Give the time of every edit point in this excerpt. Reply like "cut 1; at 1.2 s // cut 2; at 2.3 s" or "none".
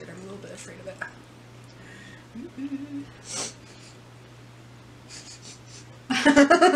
none

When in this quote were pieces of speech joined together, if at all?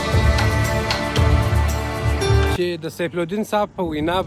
cut 1; at 2.6 s

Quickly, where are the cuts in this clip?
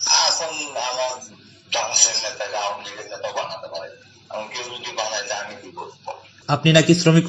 cut 1; at 6.4 s

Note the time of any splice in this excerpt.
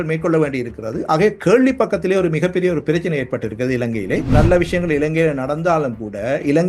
cut 1; at 4.3 s

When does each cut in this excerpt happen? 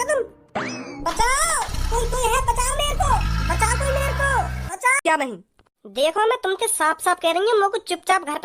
cut 1; at 5.0 s

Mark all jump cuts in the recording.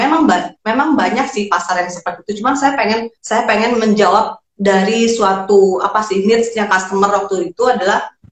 cut 1; at 3.2 s

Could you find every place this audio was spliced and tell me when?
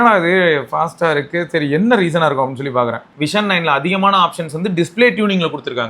cut 1; at 3.1 s

